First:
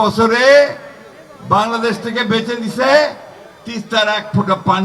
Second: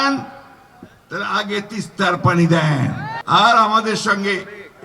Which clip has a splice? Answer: second; 1 cut; at 3.1 s

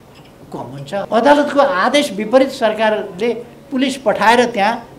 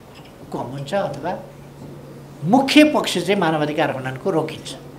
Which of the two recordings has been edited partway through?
first; 1 cut; at 1.1 s

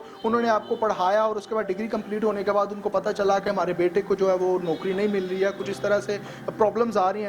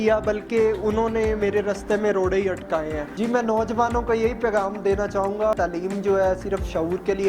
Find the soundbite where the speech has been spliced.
second; 2 cuts; at 3.3 s, 5.5 s

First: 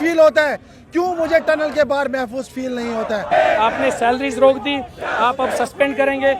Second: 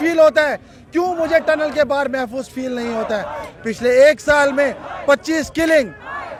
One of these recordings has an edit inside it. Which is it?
first; 1 cut; at 3.3 s

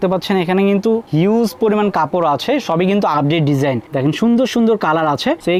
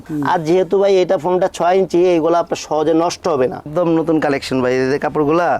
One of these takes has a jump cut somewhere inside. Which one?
second; 1 cut; at 3.6 s

